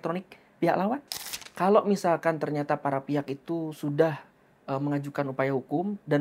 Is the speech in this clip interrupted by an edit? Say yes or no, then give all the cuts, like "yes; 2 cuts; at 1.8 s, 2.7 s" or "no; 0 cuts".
yes; 1 cut; at 1.4 s